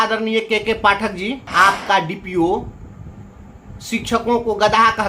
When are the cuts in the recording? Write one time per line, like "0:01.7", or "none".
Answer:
0:01.4